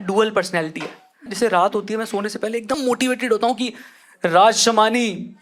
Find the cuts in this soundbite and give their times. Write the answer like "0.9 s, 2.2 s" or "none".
1.3 s, 2.8 s